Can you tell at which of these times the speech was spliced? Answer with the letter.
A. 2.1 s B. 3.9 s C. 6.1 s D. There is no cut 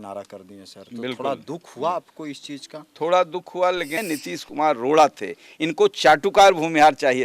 B